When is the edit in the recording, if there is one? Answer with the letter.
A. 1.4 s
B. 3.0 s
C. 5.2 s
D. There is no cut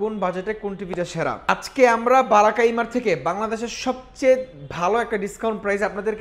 A